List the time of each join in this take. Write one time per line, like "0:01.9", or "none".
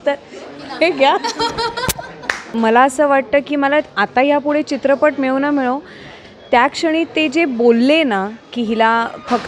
0:02.4